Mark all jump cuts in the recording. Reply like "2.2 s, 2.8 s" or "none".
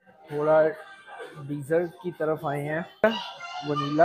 3.0 s